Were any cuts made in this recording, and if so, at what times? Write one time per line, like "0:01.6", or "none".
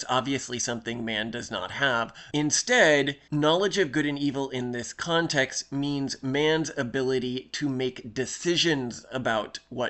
0:02.2
0:03.2